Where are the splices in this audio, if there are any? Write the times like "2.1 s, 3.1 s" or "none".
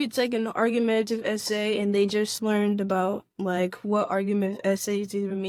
none